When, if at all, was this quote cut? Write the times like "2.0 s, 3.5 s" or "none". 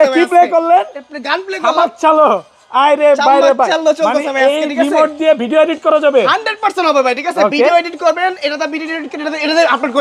none

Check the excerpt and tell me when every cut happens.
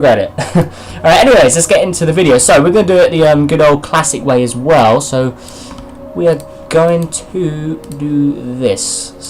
3.3 s

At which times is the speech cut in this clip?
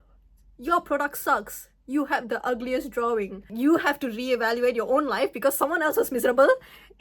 3.5 s

